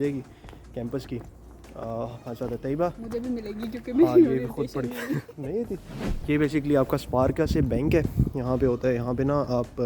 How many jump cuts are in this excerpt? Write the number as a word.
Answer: one